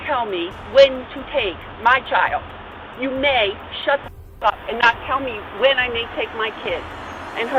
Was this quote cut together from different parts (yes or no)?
no